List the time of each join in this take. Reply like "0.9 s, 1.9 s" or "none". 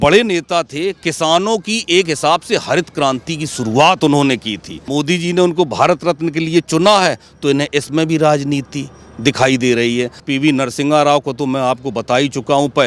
4.8 s, 10.2 s